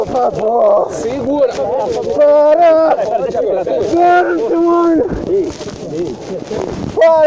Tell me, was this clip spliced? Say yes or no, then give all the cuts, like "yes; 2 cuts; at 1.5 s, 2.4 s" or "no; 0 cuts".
no; 0 cuts